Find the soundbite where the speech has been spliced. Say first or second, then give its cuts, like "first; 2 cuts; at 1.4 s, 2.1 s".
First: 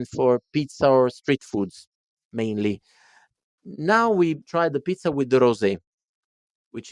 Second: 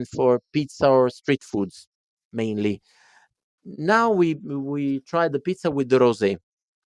first; 1 cut; at 4.4 s